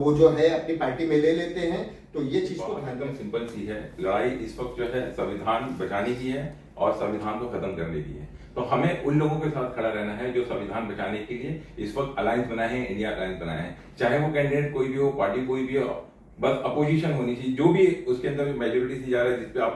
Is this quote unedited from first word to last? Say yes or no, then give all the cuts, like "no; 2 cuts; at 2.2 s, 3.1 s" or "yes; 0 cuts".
no; 1 cut; at 2.8 s